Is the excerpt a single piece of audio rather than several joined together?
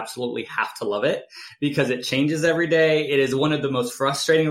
yes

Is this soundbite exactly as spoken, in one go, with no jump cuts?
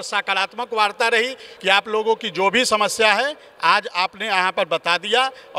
no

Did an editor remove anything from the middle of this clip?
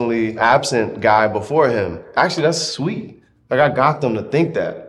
yes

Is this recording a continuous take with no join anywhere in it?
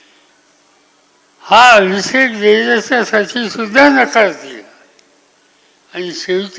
no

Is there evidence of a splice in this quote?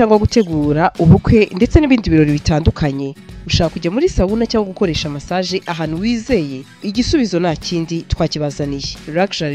no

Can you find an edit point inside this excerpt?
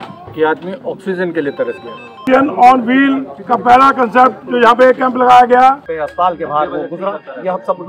yes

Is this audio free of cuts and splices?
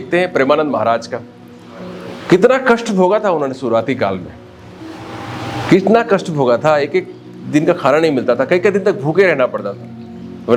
yes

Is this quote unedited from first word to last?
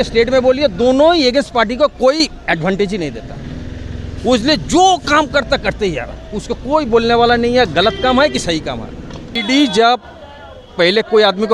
no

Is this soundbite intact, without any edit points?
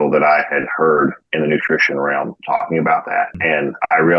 no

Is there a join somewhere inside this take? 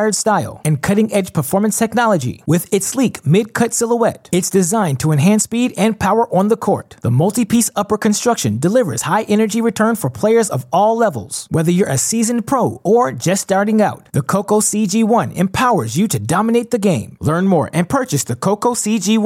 no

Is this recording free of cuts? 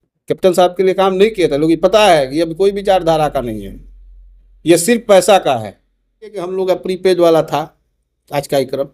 no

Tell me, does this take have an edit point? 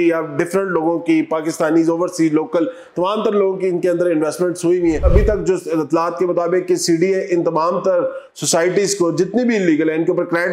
yes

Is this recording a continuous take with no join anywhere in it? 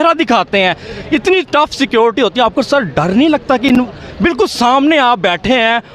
yes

